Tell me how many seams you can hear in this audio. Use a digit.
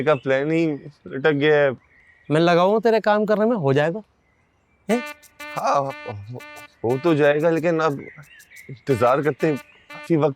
1